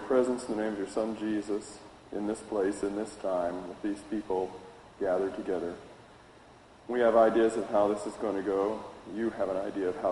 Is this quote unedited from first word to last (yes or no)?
yes